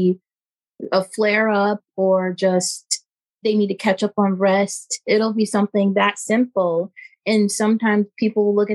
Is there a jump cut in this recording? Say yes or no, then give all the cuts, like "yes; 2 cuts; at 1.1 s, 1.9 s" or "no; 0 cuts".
no; 0 cuts